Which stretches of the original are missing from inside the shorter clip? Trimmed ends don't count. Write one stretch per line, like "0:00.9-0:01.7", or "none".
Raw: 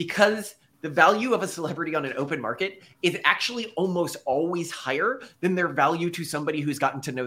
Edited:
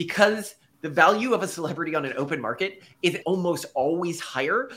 0:03.2-0:03.7

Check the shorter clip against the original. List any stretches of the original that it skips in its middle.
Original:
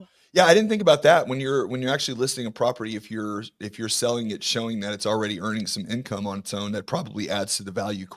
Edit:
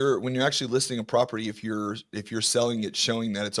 none

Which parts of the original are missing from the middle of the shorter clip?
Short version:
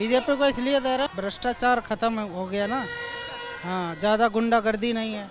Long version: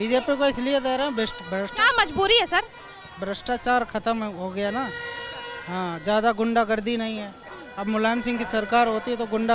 0:01.1-0:03.1

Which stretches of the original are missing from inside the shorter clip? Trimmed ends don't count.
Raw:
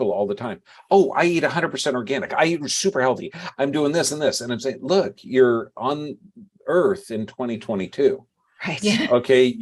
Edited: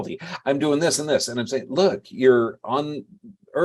none

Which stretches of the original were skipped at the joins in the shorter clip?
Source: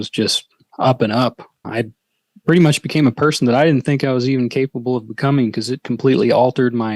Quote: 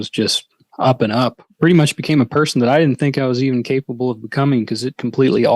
0:01.4-0:02.3

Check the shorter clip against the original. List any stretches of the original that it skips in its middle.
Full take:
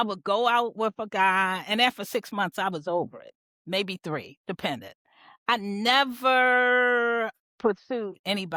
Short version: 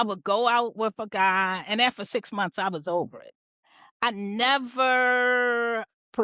0:03.5-0:05.0

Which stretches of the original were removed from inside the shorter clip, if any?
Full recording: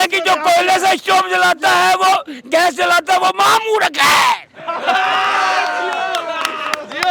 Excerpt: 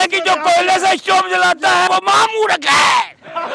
0:01.9-0:03.2

